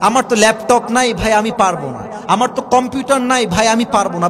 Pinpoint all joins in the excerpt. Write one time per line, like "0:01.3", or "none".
none